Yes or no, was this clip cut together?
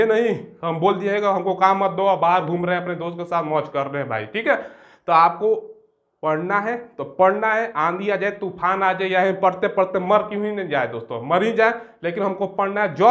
no